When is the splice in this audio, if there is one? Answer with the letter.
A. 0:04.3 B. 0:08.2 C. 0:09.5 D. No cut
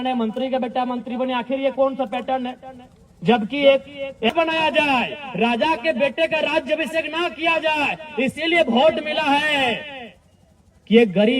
A